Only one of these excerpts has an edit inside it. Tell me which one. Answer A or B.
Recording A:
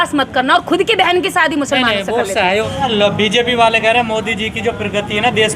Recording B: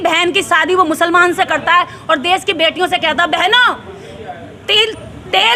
A